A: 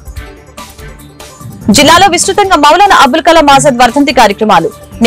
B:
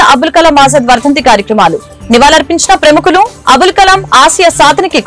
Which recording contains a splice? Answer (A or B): A